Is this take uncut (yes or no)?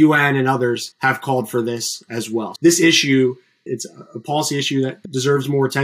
no